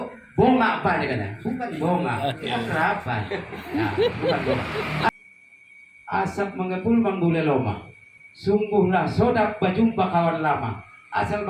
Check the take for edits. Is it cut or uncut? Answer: cut